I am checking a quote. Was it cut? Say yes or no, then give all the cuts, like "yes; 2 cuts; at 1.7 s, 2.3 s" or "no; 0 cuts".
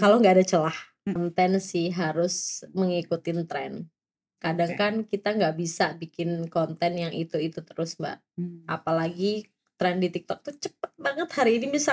yes; 1 cut; at 1.2 s